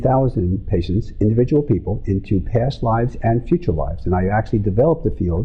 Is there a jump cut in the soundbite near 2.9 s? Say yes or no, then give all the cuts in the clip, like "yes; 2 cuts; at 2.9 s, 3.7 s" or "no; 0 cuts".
no; 1 cut; at 1.1 s